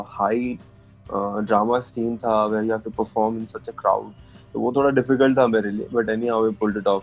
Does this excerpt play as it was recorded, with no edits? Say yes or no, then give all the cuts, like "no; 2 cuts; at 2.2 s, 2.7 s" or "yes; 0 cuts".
yes; 0 cuts